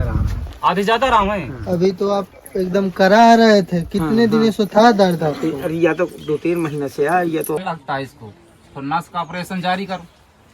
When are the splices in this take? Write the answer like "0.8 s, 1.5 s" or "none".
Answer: 7.6 s